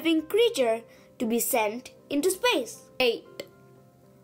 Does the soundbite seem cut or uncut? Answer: cut